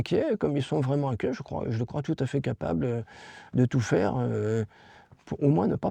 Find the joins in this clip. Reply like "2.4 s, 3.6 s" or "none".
none